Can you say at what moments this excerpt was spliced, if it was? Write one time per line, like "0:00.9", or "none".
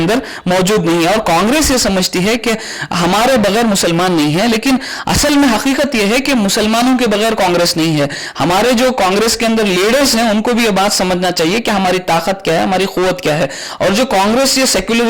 none